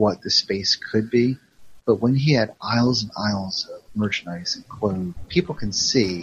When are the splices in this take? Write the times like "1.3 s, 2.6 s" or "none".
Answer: 5.2 s